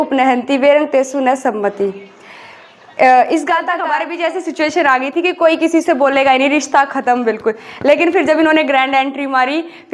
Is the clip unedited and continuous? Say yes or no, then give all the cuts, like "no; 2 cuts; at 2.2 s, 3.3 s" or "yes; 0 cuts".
no; 1 cut; at 3.8 s